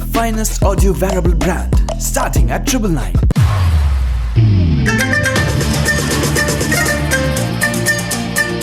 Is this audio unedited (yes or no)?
yes